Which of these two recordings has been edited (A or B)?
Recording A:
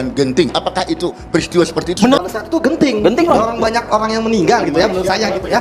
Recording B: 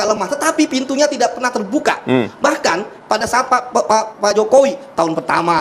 A